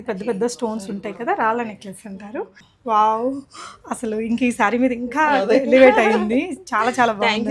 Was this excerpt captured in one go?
no; 1 cut; at 2.7 s

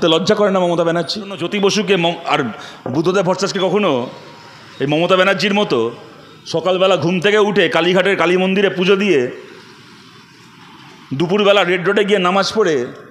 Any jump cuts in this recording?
yes; 1 cut; at 1.4 s

